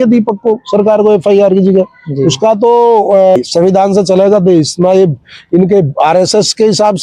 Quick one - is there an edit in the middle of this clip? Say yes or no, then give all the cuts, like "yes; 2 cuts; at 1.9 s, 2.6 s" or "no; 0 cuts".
yes; 1 cut; at 3.4 s